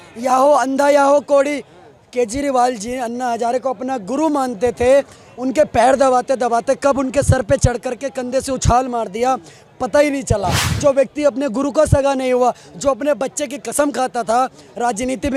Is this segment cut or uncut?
uncut